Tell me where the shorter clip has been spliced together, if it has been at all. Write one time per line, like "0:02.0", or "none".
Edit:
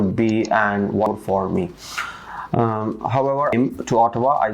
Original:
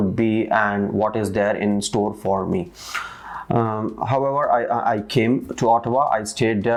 0:01.1
0:03.5

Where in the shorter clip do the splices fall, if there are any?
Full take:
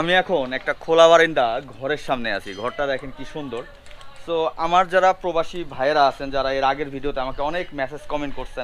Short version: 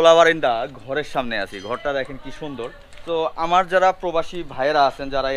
0:02.9

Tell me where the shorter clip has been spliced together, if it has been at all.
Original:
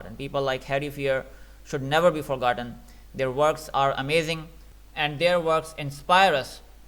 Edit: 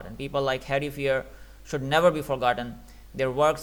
none

